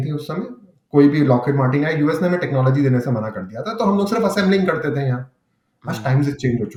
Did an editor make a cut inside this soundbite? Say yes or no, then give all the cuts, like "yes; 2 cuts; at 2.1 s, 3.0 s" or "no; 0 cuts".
no; 0 cuts